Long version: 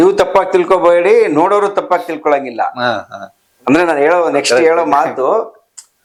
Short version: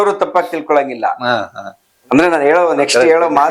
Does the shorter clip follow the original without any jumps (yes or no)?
yes